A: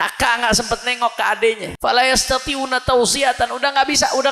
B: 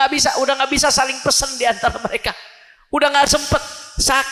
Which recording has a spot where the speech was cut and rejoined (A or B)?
A